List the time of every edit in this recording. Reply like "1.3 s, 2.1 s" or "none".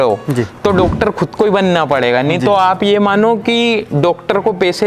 none